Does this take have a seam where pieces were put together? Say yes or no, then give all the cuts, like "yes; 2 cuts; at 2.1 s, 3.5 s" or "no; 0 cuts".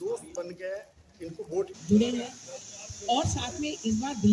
yes; 1 cut; at 1.7 s